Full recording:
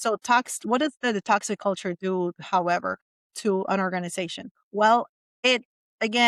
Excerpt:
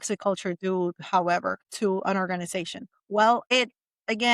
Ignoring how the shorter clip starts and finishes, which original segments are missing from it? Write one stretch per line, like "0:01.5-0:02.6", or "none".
0:03.0-0:03.2
0:05.1-0:05.4